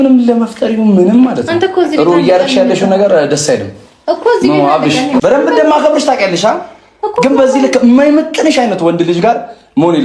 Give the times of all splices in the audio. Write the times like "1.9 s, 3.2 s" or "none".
5.2 s